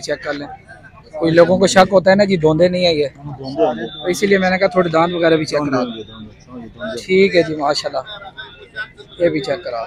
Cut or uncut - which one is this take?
uncut